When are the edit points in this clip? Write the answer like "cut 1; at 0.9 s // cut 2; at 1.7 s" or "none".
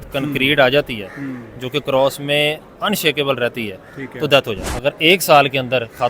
cut 1; at 4.7 s